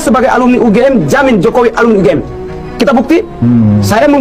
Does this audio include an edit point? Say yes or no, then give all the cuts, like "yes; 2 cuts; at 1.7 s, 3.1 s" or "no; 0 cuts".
no; 0 cuts